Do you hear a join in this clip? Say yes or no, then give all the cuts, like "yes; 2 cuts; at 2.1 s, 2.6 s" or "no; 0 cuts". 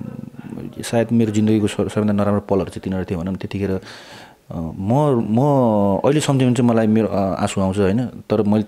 no; 0 cuts